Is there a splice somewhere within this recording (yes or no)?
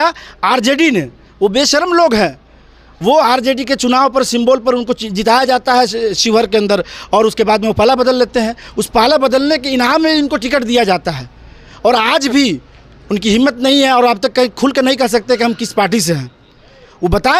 no